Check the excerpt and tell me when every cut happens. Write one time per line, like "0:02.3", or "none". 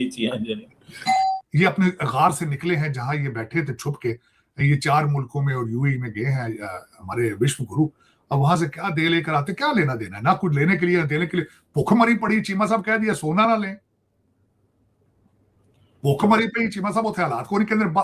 0:01.4